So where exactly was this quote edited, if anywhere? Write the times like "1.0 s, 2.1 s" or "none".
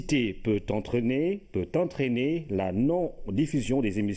2.9 s